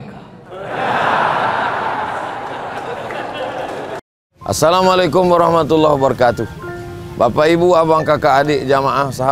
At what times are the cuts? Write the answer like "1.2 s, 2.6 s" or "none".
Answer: 4.1 s

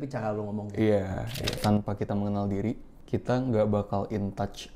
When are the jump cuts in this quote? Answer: 1.6 s, 2.9 s

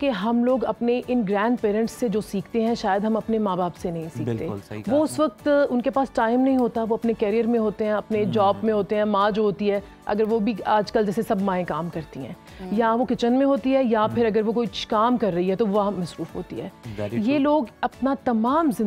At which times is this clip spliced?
none

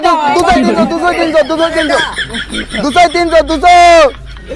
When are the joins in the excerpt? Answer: none

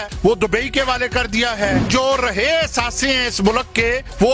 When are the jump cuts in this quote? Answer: 1.8 s

